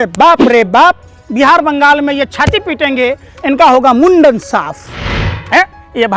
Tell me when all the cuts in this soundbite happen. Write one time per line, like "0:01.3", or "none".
0:05.2